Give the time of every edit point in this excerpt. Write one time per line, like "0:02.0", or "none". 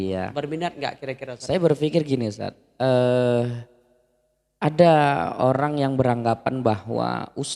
0:01.3